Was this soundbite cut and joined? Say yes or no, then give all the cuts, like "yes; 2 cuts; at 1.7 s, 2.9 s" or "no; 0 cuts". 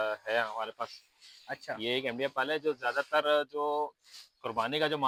no; 0 cuts